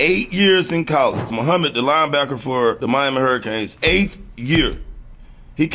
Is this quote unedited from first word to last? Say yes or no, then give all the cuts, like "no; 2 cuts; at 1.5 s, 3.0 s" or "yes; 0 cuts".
no; 2 cuts; at 3.0 s, 4.8 s